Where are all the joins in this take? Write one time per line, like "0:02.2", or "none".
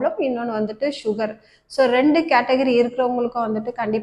none